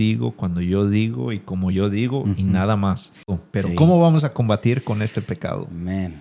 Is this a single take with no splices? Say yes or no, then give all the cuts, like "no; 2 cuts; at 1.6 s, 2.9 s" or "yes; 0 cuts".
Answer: no; 1 cut; at 3.4 s